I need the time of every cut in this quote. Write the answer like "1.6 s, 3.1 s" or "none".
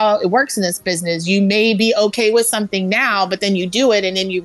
none